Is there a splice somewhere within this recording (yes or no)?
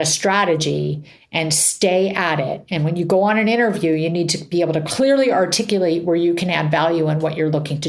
yes